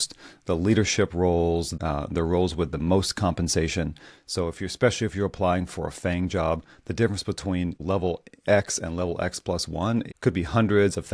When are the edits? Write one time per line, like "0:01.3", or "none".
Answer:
0:01.8
0:07.8
0:10.1